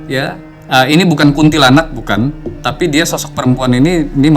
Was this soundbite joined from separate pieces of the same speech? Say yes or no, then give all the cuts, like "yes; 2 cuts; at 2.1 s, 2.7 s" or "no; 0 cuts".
no; 0 cuts